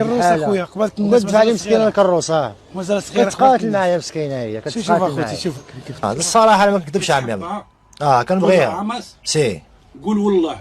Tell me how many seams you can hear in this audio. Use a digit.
1